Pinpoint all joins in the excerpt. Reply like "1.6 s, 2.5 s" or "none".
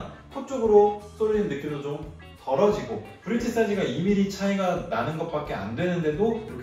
3.1 s